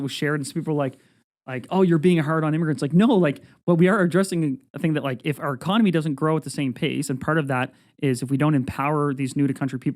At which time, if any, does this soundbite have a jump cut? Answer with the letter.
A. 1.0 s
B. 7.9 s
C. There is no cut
C